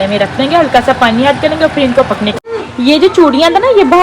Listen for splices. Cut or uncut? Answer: cut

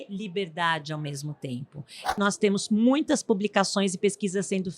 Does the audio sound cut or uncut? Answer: cut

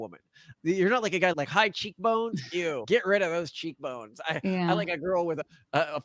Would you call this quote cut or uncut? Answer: cut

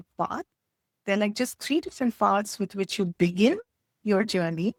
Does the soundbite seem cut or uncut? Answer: uncut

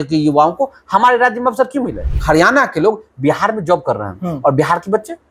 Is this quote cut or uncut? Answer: cut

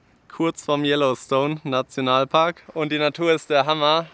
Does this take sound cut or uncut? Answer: cut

